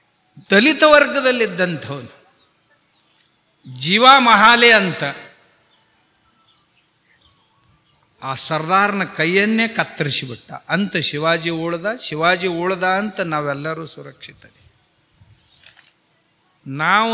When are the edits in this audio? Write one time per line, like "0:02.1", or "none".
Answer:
0:15.9